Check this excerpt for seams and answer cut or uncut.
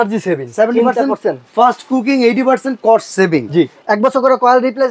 cut